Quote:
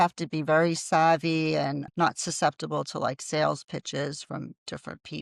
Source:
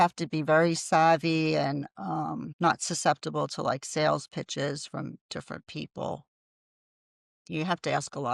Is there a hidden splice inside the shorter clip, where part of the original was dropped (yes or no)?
yes